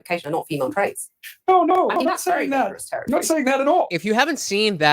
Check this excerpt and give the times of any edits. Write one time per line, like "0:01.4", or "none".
0:03.9